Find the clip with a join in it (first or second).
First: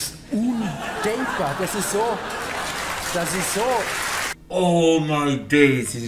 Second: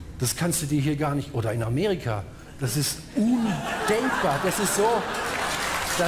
first